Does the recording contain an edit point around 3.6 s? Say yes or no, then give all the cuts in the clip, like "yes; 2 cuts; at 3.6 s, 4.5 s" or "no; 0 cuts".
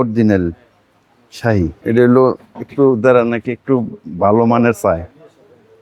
no; 1 cut; at 1.8 s